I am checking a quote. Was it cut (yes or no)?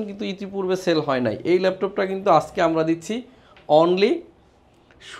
no